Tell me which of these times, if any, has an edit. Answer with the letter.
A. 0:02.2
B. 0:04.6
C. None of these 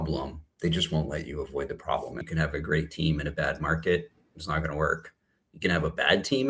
A